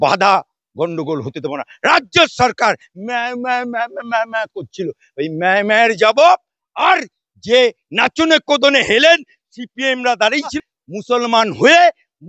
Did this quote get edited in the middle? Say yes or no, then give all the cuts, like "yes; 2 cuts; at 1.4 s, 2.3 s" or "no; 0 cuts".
no; 0 cuts